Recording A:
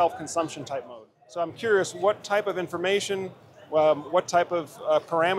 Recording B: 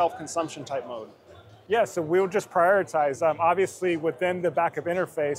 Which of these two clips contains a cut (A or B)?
A